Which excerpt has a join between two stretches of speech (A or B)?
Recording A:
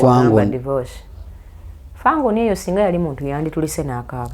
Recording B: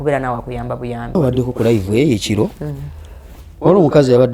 B